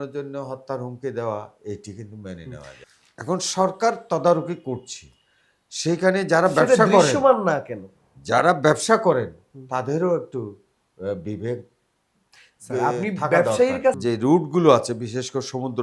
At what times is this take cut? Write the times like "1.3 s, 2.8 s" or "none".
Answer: 2.7 s, 14.0 s